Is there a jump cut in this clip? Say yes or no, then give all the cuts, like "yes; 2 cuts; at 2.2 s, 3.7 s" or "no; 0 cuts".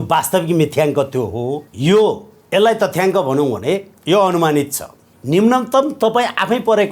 yes; 2 cuts; at 1.7 s, 5.1 s